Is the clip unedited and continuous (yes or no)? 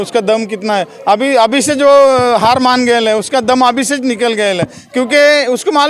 yes